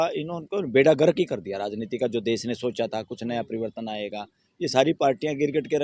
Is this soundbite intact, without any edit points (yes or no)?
yes